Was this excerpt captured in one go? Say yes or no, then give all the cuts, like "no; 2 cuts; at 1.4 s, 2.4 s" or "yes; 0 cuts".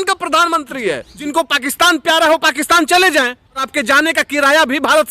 no; 2 cuts; at 1.3 s, 3.7 s